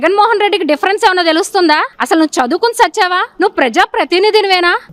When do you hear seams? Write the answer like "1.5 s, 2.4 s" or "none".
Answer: none